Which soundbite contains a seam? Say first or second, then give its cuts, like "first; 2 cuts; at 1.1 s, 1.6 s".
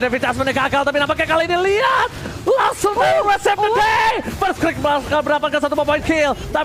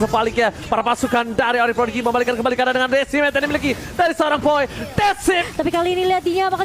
second; 1 cut; at 5.4 s